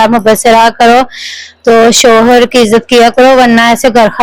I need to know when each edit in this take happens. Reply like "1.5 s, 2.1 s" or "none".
none